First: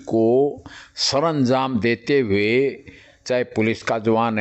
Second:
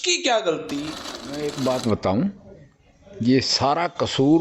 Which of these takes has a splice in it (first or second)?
second